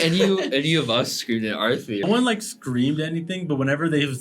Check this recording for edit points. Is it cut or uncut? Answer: cut